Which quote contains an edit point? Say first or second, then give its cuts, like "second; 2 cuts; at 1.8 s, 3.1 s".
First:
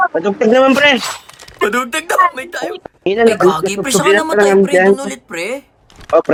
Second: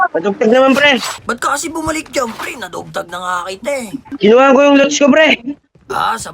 second; 2 cuts; at 1.2 s, 4.1 s